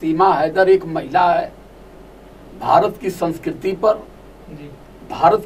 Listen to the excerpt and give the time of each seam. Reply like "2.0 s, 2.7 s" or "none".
none